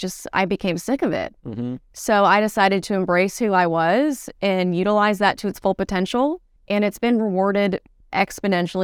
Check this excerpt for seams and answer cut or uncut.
cut